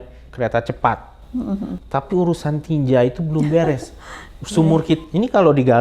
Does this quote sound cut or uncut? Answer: uncut